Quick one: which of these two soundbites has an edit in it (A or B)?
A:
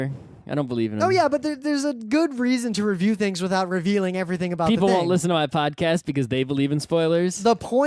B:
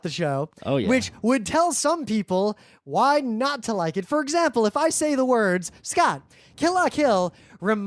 A